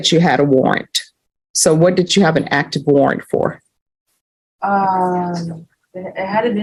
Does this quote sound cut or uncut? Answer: uncut